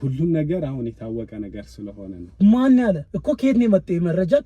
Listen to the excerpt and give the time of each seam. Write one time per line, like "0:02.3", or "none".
0:03.1